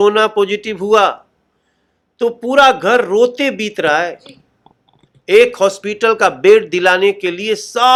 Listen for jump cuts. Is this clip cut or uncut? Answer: uncut